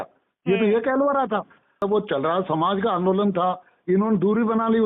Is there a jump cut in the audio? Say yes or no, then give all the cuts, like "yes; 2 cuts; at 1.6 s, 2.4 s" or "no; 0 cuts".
yes; 1 cut; at 1.8 s